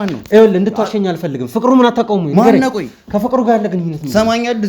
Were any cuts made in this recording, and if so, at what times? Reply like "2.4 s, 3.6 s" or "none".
none